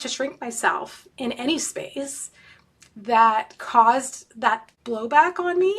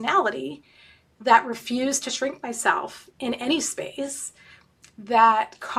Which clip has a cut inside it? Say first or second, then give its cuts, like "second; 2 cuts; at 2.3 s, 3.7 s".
first; 1 cut; at 4.7 s